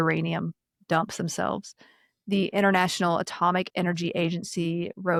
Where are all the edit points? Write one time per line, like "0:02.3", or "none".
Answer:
none